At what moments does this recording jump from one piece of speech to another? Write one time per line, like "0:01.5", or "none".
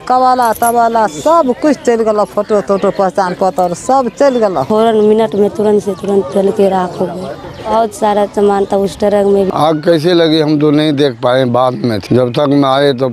0:04.6
0:09.5
0:12.0